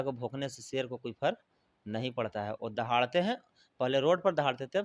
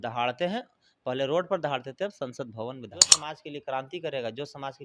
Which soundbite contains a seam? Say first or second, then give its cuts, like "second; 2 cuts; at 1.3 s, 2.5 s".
second; 1 cut; at 3.3 s